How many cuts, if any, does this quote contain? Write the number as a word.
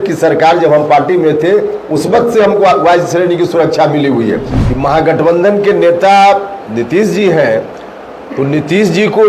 one